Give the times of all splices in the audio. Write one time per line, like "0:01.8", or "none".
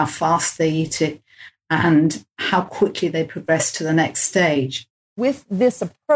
0:05.2